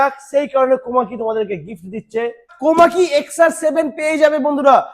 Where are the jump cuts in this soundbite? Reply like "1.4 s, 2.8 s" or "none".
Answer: 2.5 s